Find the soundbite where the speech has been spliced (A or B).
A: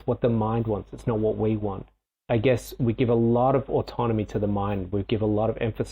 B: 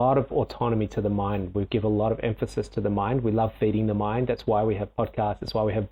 A